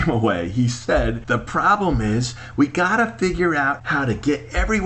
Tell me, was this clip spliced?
yes; 2 cuts; at 1.2 s, 3.8 s

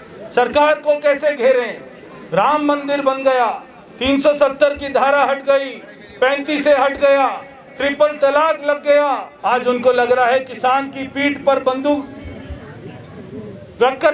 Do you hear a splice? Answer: yes; 1 cut; at 9.3 s

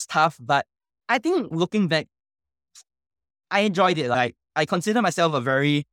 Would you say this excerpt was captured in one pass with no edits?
no; 1 cut; at 4.1 s

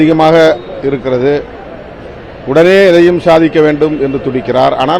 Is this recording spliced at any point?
no; 0 cuts

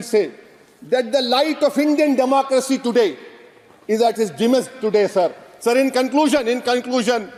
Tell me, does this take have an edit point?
no; 0 cuts

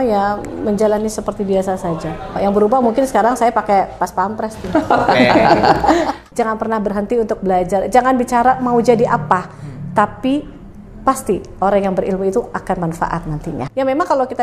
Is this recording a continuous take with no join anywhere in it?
no; 3 cuts; at 2.4 s, 6.2 s, 13.5 s

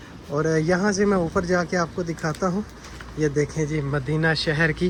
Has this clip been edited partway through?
no; 0 cuts

